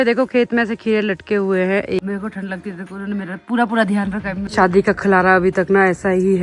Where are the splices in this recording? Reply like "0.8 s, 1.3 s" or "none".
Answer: 2.0 s, 4.5 s